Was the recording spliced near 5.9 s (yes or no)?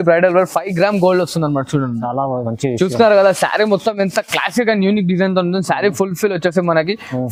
no